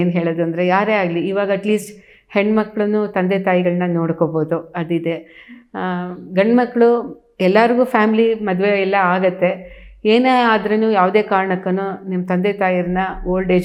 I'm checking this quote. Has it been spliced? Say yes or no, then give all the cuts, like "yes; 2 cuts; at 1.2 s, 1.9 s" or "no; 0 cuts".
no; 0 cuts